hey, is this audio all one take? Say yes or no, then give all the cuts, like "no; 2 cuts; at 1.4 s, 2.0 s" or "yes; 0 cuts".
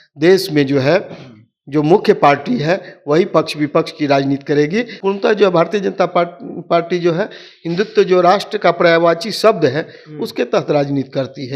no; 1 cut; at 4.9 s